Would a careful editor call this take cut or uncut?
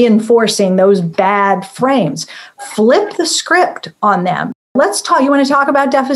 cut